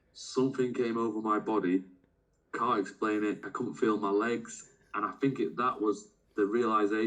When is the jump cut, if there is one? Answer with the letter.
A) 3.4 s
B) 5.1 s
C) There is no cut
A